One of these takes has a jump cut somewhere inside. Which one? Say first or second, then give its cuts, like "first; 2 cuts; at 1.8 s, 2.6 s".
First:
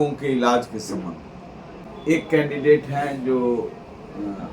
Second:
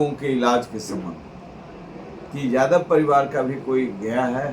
first; 1 cut; at 1.9 s